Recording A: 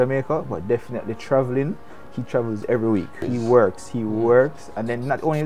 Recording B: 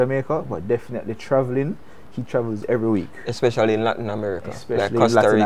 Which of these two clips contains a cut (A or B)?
A